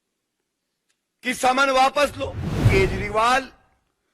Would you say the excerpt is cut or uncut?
cut